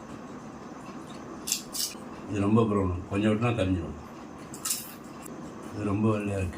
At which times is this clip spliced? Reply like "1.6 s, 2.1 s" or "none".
1.9 s, 5.3 s

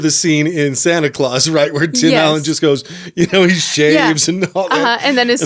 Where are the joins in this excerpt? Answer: none

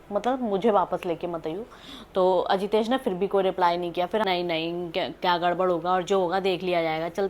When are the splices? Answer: 4.2 s

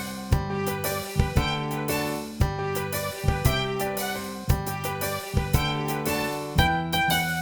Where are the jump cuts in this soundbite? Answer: none

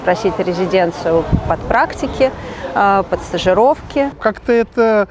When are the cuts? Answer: 4.2 s

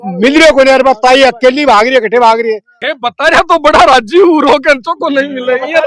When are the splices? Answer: 2.7 s

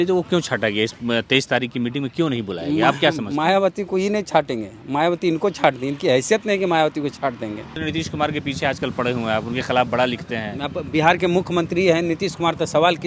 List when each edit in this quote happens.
7.8 s

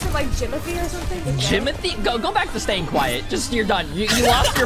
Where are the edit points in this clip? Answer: 1.2 s

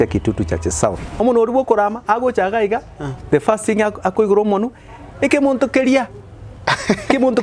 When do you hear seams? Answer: 1.1 s

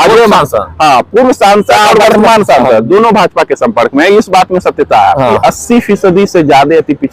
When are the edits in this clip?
5.4 s

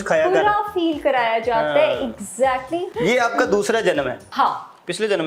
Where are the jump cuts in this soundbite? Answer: 2.9 s, 4.3 s

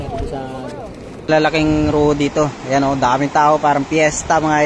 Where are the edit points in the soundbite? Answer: 1.3 s

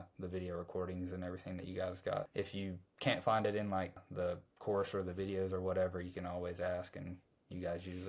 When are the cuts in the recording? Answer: 2.3 s, 4.0 s

